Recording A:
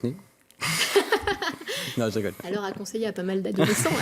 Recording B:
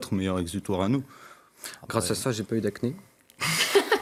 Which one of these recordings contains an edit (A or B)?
A